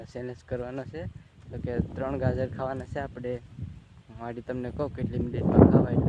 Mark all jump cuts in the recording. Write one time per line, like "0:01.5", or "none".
none